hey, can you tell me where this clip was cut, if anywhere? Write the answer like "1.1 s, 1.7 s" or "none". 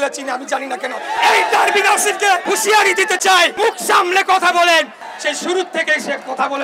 1.2 s, 2.4 s, 3.5 s, 5.1 s